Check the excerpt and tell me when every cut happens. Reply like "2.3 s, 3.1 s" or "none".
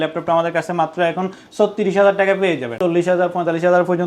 2.8 s